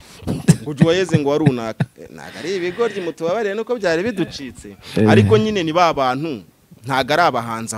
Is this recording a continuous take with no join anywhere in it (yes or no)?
yes